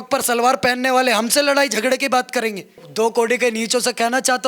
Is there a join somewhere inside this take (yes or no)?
yes